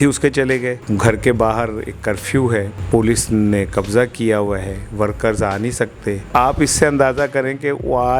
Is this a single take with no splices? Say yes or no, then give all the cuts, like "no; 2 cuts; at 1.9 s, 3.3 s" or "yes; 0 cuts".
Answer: no; 3 cuts; at 0.8 s, 2.8 s, 6.2 s